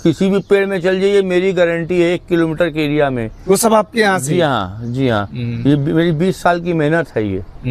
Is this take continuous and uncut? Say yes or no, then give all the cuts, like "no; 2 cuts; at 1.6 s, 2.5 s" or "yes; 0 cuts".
yes; 0 cuts